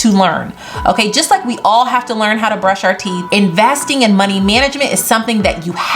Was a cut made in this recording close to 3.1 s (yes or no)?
yes